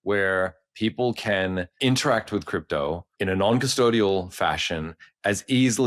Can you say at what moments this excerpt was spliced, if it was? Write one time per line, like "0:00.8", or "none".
0:01.8
0:03.1